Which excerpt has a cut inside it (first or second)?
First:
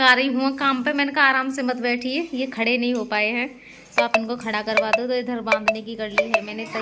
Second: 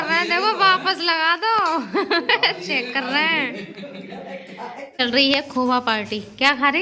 second